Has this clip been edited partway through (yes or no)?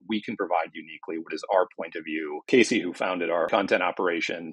yes